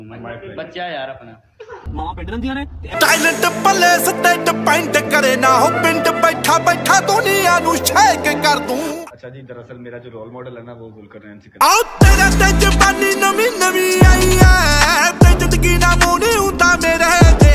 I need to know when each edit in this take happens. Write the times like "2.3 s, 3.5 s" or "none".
none